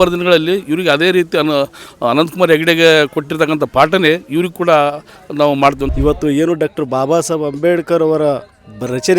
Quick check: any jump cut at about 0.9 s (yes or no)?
no